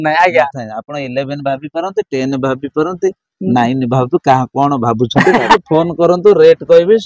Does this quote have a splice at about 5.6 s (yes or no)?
yes